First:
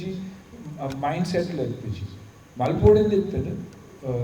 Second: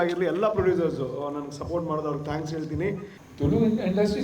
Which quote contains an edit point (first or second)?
second